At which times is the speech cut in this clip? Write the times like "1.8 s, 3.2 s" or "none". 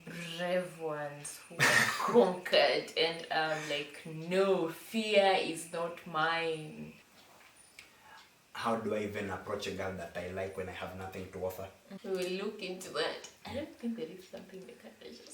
7.0 s, 11.9 s